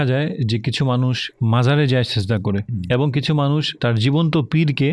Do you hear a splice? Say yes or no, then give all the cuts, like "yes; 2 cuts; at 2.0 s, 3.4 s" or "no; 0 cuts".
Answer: no; 0 cuts